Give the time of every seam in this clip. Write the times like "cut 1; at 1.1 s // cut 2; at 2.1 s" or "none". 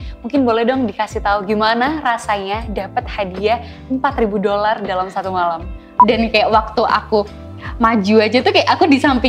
cut 1; at 5.9 s